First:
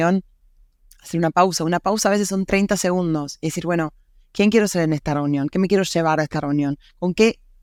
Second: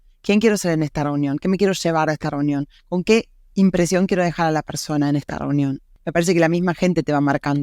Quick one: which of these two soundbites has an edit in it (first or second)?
second